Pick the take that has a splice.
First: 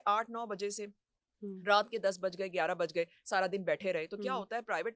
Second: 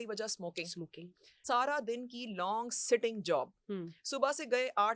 second; 1 cut; at 1.3 s

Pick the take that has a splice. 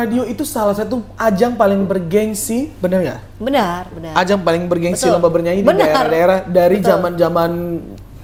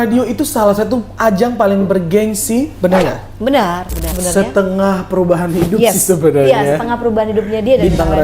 second; 1 cut; at 4.1 s

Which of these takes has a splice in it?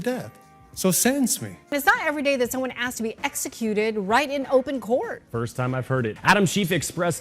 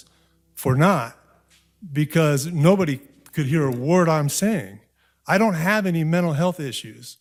first; 2 cuts; at 1.7 s, 6.2 s

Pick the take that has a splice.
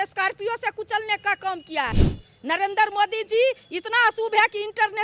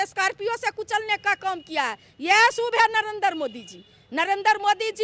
first; 1 cut; at 2.1 s

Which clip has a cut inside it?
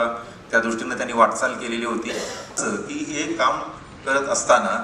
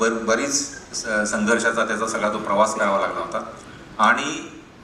first; 1 cut; at 2.6 s

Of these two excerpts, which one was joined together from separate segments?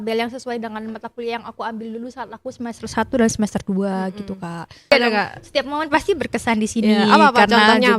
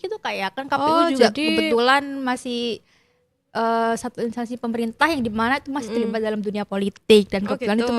first; 1 cut; at 4.9 s

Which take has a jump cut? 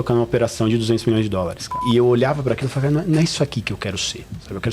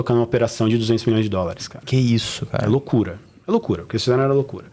first; 1 cut; at 1.8 s

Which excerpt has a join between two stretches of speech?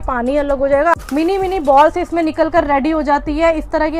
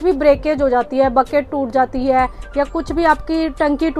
first; 1 cut; at 1.0 s

